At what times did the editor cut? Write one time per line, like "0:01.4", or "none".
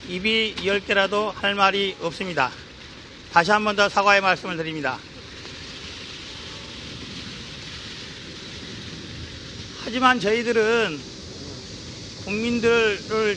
0:06.3